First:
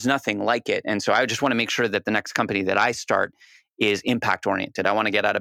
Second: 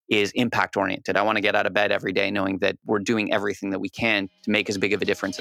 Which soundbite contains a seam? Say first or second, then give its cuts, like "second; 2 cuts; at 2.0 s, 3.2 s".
second; 2 cuts; at 2.8 s, 4.3 s